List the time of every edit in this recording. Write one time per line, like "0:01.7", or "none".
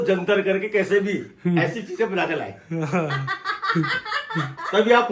none

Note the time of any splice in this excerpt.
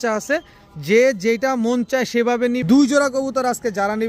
0:02.6

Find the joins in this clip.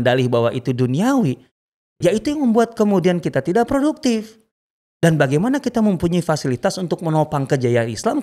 none

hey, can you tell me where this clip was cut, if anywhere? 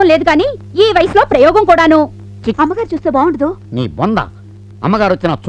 0:02.5

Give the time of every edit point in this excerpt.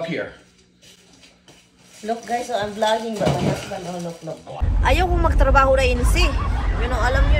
0:04.7

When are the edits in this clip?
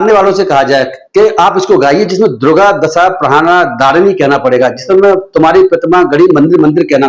none

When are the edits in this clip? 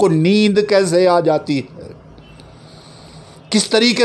none

